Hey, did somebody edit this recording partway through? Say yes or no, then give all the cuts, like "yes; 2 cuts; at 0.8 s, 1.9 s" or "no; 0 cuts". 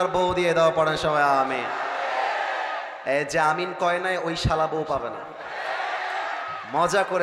no; 0 cuts